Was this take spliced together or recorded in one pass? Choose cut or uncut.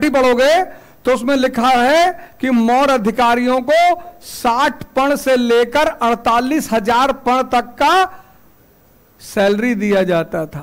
uncut